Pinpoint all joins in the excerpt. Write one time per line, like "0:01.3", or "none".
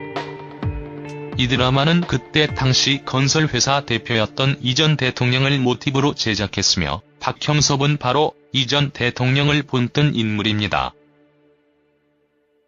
0:05.2